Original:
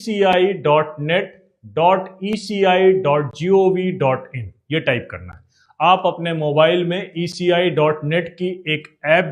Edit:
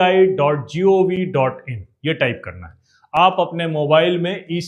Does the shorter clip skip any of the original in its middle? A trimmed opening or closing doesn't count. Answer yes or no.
no